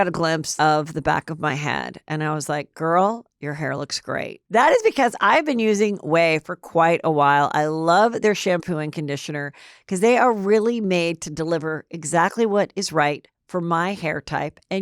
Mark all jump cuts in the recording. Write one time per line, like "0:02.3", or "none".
0:04.3